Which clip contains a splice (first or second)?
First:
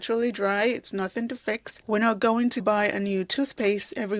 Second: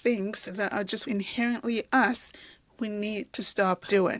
first